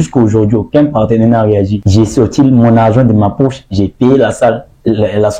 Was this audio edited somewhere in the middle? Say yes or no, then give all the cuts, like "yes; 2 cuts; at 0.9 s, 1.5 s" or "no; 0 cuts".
yes; 1 cut; at 1.8 s